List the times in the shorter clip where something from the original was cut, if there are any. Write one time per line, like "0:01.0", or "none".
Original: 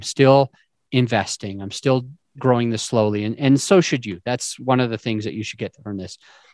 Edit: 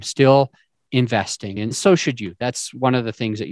0:01.8